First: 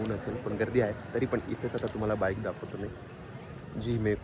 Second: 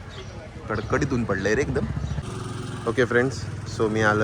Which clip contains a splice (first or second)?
second